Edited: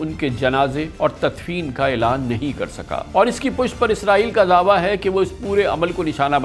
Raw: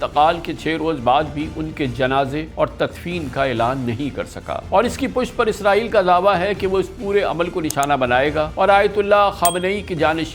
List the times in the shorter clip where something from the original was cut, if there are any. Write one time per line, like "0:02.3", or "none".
none